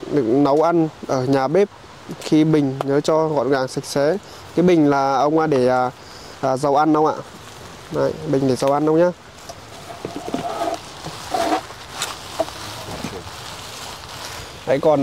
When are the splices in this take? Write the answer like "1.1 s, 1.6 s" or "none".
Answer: none